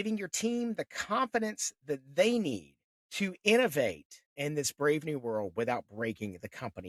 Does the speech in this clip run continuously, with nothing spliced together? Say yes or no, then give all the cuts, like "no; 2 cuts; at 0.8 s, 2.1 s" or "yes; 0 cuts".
yes; 0 cuts